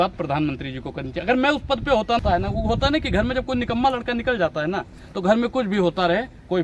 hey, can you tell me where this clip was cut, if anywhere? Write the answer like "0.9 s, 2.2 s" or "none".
2.2 s